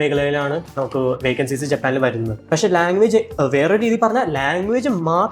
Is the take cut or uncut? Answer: cut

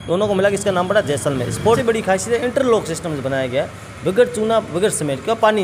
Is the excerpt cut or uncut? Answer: cut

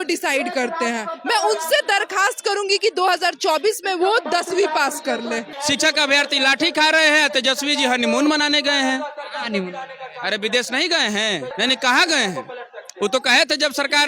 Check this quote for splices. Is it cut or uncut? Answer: cut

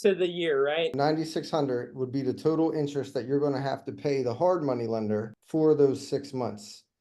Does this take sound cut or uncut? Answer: cut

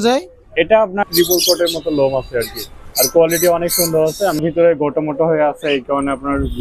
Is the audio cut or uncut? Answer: cut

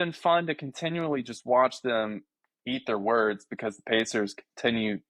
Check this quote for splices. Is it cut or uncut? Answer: uncut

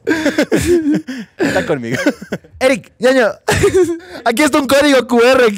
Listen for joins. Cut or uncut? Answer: cut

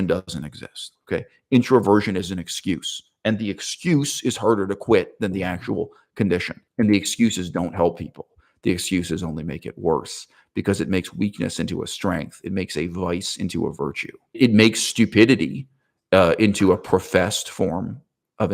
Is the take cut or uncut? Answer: cut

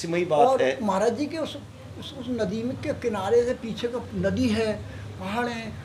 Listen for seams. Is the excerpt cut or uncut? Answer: uncut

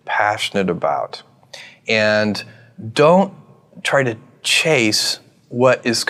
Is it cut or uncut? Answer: uncut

